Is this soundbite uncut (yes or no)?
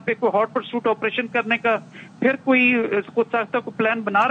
yes